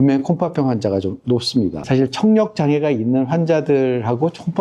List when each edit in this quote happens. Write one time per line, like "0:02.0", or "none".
0:01.8